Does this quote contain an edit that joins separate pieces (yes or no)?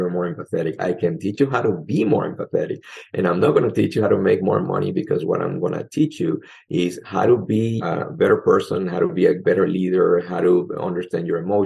yes